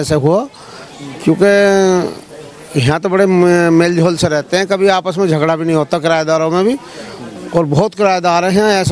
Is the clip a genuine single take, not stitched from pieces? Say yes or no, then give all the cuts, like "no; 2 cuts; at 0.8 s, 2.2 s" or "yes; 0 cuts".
yes; 0 cuts